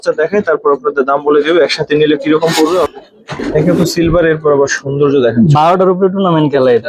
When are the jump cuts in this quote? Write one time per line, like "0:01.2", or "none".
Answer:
0:03.4